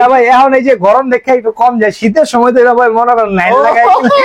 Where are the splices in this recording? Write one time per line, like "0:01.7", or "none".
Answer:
none